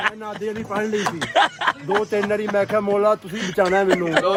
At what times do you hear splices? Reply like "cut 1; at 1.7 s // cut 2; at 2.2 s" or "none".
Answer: none